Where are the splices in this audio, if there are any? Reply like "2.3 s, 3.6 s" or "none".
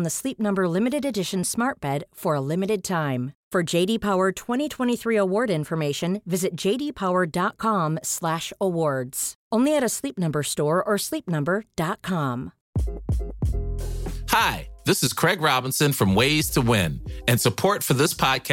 12.5 s